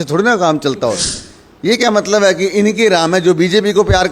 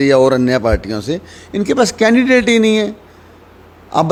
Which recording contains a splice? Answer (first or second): first